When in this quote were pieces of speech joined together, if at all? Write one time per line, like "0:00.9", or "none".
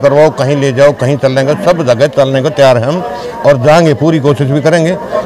none